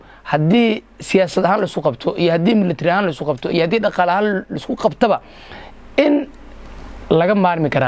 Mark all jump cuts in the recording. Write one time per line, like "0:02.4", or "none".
none